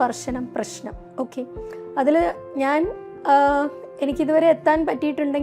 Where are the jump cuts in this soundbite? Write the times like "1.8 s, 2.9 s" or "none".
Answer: none

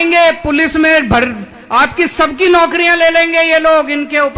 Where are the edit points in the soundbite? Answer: none

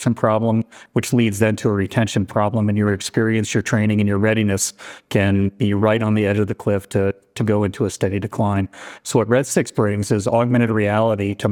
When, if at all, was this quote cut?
none

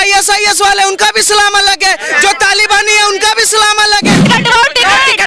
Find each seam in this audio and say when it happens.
4.2 s

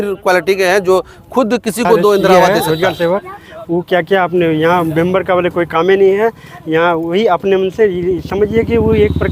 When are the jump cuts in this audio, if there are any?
2.5 s

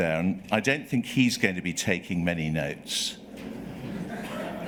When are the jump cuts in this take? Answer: none

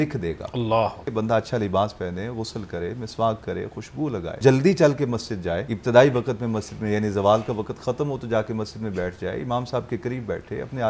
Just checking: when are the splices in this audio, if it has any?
1.0 s, 4.4 s, 5.7 s

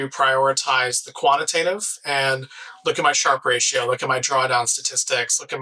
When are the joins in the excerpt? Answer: none

